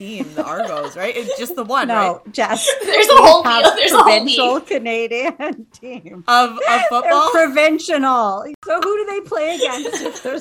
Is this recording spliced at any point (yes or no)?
no